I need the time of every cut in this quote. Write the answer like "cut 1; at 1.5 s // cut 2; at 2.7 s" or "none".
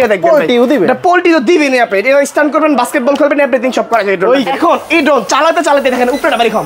cut 1; at 4.5 s